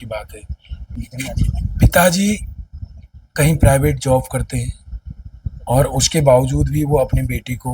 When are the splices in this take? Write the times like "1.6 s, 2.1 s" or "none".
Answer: 0.9 s